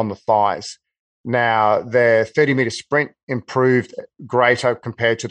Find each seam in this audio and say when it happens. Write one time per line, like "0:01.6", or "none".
none